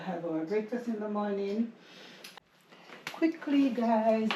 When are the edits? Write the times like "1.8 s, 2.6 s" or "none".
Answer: 2.3 s